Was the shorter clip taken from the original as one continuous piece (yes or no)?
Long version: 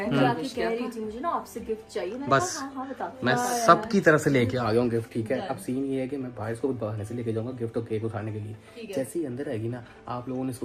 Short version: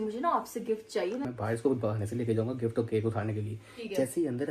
no